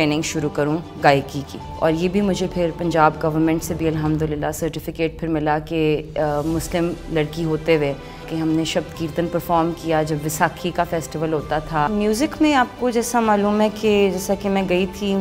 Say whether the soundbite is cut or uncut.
cut